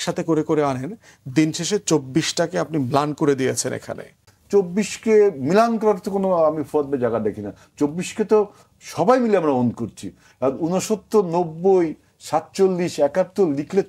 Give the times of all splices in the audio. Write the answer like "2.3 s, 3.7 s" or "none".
4.3 s